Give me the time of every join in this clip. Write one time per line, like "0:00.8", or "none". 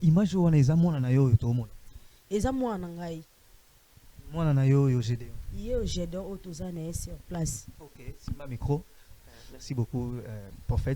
none